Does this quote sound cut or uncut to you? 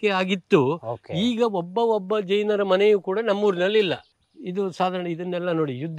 cut